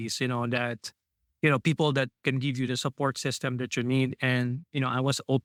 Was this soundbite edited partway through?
no; 0 cuts

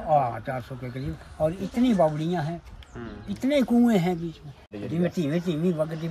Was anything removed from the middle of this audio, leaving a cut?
yes; 1 cut; at 4.7 s

